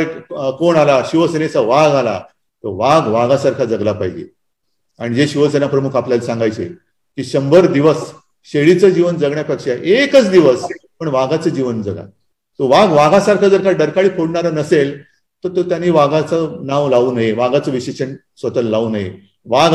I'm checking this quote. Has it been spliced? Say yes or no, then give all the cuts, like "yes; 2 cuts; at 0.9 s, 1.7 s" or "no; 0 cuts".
no; 0 cuts